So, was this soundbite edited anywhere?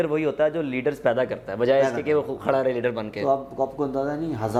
no; 0 cuts

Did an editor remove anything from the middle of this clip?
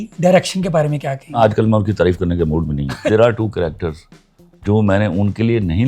yes; 2 cuts; at 1.4 s, 3.0 s

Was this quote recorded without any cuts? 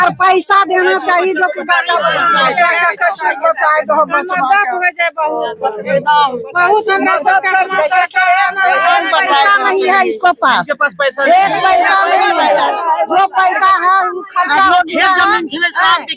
yes; 0 cuts

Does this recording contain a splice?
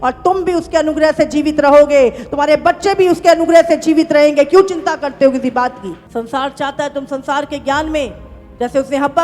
yes; 1 cut; at 5.9 s

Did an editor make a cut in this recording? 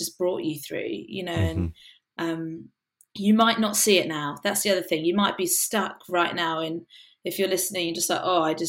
no; 0 cuts

